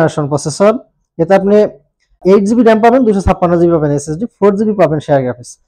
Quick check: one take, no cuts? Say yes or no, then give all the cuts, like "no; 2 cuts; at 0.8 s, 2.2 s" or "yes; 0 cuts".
yes; 0 cuts